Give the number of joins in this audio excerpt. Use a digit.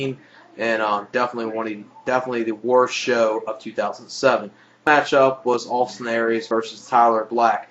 1